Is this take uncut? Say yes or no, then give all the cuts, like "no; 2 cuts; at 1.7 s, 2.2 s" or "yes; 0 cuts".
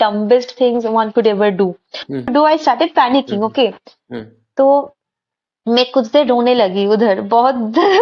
no; 1 cut; at 2.3 s